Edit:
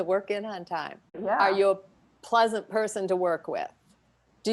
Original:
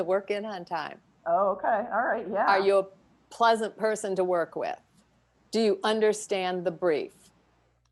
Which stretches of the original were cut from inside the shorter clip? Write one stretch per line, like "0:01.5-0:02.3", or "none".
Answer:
0:01.2-0:02.2